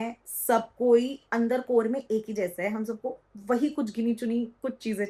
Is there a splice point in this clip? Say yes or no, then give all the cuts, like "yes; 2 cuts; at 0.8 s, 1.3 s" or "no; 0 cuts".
no; 0 cuts